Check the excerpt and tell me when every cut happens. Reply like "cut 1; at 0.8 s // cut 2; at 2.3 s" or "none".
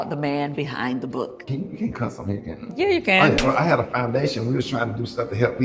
cut 1; at 1.4 s // cut 2; at 3.4 s